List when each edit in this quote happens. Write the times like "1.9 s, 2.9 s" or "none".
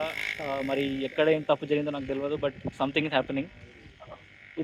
none